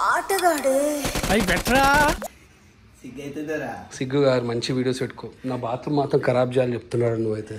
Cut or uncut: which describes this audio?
uncut